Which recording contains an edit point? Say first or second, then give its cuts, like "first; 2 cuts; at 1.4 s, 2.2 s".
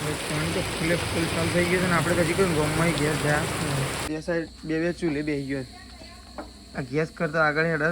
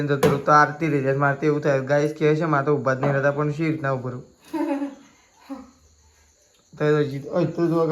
first; 1 cut; at 4.0 s